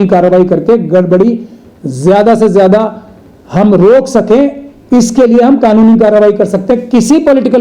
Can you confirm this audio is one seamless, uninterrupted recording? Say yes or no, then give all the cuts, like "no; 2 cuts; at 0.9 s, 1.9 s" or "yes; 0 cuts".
yes; 0 cuts